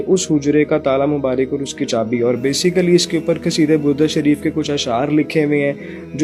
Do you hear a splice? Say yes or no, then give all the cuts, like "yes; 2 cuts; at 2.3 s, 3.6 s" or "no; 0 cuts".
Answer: no; 0 cuts